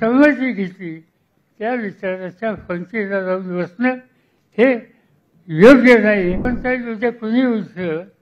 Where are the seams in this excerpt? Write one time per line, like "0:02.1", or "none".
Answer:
0:06.5